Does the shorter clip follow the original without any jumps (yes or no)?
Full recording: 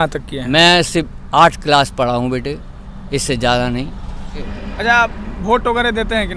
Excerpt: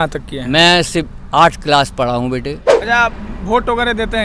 no